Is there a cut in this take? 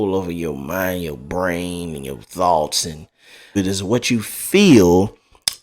yes; 1 cut; at 3.6 s

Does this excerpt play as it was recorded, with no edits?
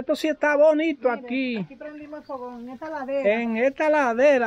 yes; 0 cuts

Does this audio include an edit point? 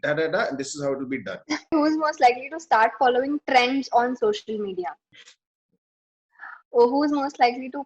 yes; 1 cut; at 1.7 s

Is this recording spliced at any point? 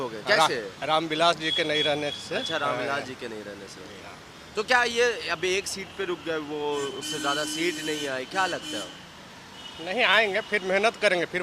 no; 0 cuts

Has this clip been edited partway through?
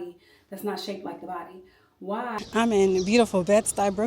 yes; 1 cut; at 2.4 s

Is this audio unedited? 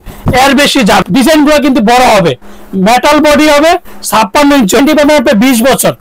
no; 2 cuts; at 1.0 s, 4.8 s

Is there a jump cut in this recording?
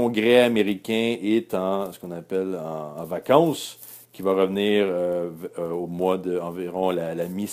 no; 0 cuts

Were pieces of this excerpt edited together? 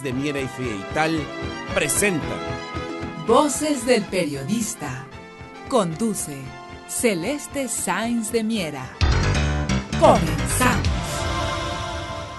no; 0 cuts

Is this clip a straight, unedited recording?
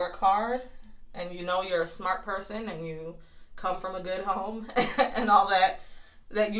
yes; 0 cuts

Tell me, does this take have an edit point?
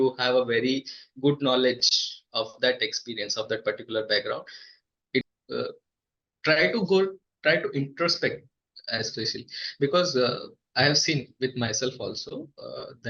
yes; 1 cut; at 5.2 s

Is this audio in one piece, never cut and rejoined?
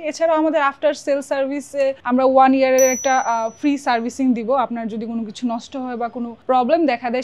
yes; 0 cuts

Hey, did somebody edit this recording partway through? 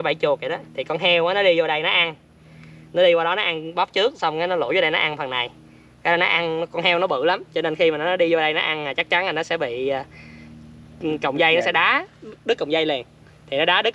no; 0 cuts

